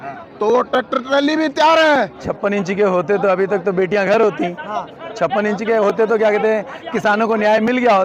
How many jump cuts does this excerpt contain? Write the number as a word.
one